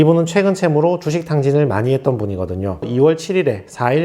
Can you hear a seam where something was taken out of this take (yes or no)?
yes